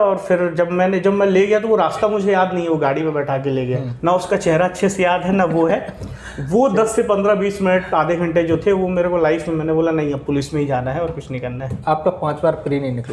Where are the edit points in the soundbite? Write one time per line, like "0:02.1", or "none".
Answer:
0:03.9
0:11.8